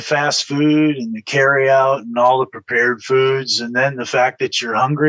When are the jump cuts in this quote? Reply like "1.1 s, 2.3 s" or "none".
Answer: none